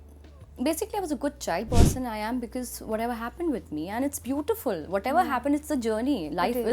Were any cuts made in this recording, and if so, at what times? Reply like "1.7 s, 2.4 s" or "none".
1.7 s